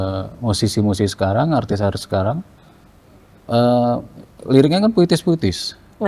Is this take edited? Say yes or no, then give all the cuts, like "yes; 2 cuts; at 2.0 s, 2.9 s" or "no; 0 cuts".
no; 0 cuts